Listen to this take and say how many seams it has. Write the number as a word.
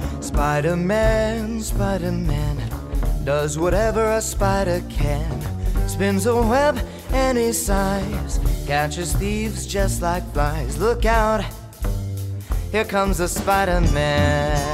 zero